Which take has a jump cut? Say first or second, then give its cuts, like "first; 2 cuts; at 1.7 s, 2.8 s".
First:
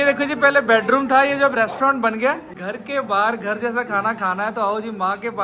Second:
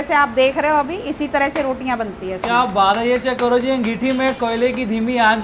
first; 1 cut; at 2.5 s